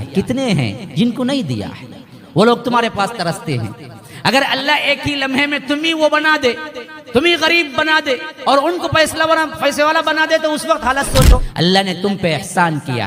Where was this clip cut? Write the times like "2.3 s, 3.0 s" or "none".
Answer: 11.5 s